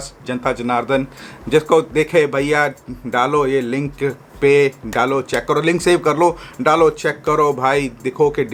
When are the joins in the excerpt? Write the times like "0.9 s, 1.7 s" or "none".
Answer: none